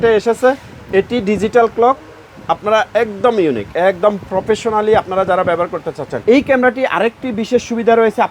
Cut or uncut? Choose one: cut